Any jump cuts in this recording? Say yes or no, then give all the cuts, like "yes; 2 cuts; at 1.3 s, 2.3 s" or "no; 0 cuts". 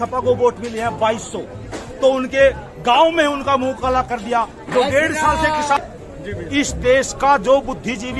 yes; 1 cut; at 5.8 s